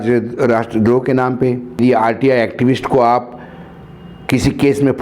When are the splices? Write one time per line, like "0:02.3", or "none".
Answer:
0:01.8